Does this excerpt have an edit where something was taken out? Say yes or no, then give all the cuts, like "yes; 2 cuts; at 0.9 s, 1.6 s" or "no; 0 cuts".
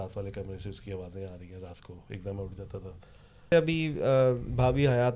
yes; 1 cut; at 3.5 s